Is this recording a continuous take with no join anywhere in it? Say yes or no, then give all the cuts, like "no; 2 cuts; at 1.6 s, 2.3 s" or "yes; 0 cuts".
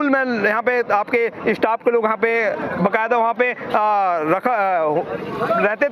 yes; 0 cuts